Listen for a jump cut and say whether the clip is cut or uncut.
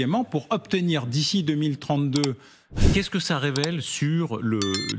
cut